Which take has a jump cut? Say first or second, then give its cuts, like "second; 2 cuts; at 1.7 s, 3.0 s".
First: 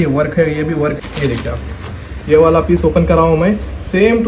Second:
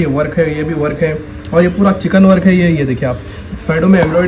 first; 1 cut; at 0.9 s